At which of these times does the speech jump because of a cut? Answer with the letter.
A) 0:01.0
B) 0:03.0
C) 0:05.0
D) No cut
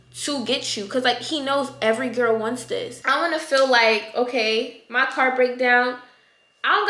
B